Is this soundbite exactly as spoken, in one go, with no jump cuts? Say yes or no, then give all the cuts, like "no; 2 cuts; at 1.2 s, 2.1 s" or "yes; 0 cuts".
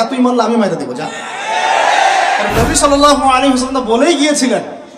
no; 1 cut; at 2.5 s